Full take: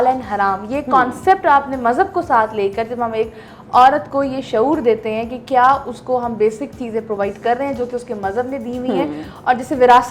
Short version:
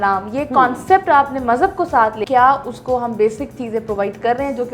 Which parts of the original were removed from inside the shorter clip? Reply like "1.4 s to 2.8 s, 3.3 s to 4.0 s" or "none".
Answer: 2.6 s to 5.4 s

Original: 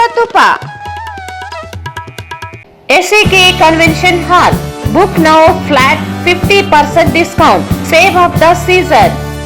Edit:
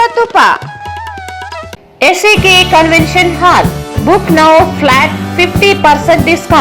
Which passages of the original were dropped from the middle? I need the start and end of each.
1.8 s to 2.7 s

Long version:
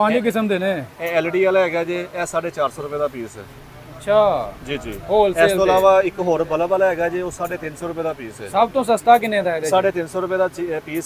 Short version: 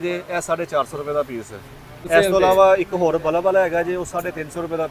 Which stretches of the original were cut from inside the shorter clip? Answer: 3.9 s to 5.3 s

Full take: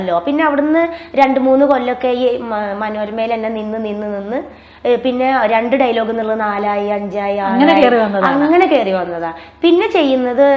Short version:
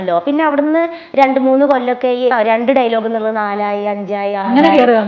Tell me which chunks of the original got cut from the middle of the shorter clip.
2.3 s to 5.3 s

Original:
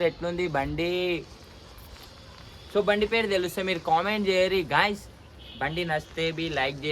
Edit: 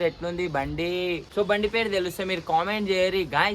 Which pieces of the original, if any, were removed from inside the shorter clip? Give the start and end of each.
1.3 s to 2.6 s

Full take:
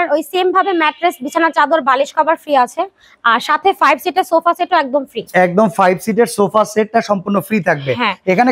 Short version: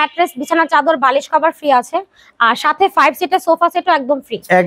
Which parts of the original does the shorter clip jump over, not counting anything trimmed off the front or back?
none

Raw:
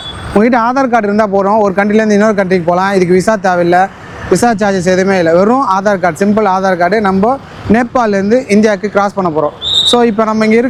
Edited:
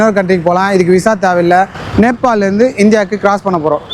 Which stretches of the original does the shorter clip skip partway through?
4.0 s to 7.5 s

